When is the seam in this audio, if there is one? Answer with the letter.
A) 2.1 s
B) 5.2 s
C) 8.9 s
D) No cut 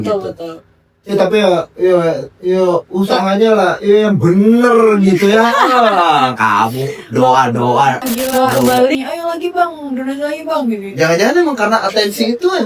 C